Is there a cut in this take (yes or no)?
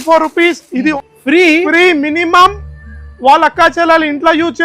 yes